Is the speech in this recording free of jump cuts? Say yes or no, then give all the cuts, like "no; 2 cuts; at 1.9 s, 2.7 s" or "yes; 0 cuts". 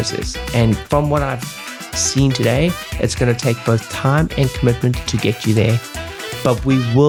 yes; 0 cuts